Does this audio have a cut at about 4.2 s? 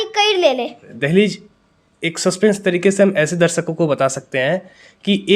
no; 1 cut; at 0.9 s

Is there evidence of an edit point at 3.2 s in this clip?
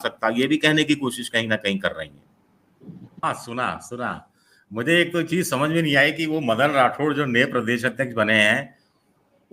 yes; 1 cut; at 3.2 s

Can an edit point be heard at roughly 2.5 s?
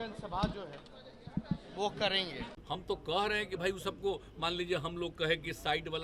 yes; 1 cut; at 2.5 s

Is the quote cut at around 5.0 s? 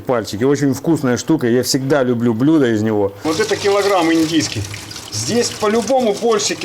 no; 1 cut; at 3.3 s

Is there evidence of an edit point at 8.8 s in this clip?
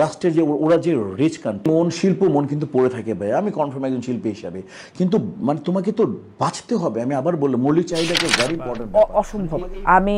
yes; 2 cuts; at 1.6 s, 8.8 s

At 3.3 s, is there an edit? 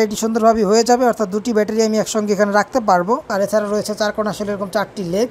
yes; 1 cut; at 3.3 s

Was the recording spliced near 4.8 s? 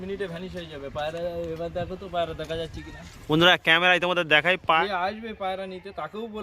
yes; 1 cut; at 4.8 s

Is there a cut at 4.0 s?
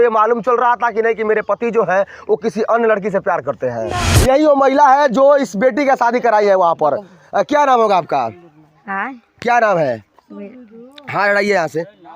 yes; 1 cut; at 4.0 s

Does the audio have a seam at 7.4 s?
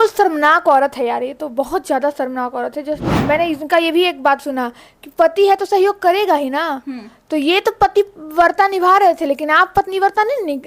no; 1 cut; at 3.1 s

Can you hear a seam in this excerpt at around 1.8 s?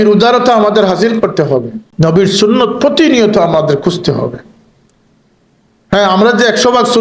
yes; 1 cut; at 1.8 s

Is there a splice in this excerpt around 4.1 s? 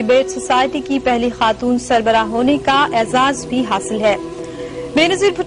no; 1 cut; at 1.8 s

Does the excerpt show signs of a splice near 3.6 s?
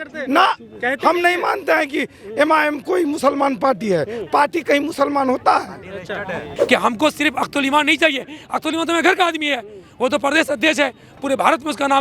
no; 1 cut; at 6.4 s

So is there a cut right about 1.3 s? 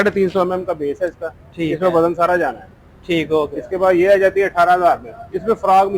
no; 0 cuts

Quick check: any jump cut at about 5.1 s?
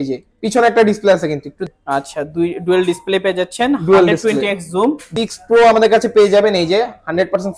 yes; 2 cuts; at 1.7 s, 5.1 s

